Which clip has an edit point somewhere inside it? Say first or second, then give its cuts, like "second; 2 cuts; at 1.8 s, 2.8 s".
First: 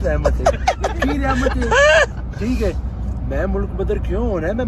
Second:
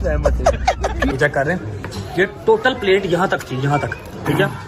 second; 1 cut; at 1.1 s